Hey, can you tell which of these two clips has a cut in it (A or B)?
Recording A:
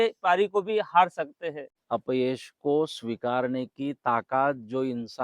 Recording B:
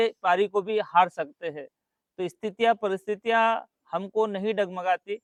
A